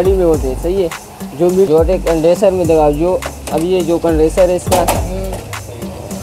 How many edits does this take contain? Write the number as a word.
one